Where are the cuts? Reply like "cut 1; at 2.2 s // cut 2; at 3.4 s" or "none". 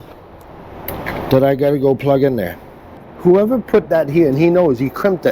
cut 1; at 3.1 s